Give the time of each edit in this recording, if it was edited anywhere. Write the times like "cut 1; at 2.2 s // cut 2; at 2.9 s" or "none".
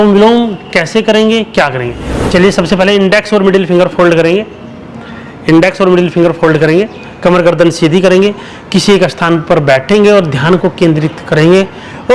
none